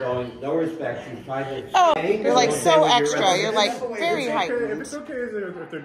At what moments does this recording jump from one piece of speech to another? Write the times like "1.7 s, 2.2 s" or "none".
1.9 s

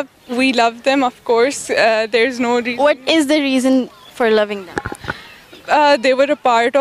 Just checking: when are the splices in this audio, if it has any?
none

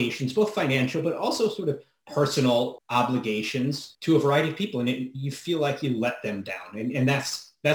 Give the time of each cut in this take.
2.8 s, 3.9 s

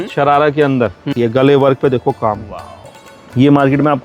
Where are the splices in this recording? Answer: 1.1 s

